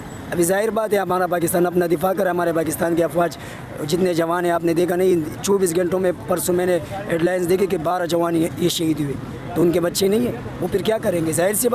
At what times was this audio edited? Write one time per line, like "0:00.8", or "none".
none